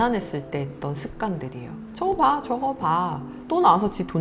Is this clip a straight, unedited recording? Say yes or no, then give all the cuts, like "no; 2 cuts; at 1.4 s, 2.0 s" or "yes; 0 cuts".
no; 1 cut; at 1.8 s